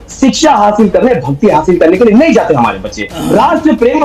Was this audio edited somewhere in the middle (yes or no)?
yes